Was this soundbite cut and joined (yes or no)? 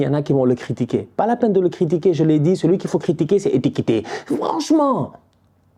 no